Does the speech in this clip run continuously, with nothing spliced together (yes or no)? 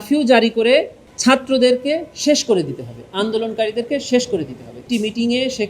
no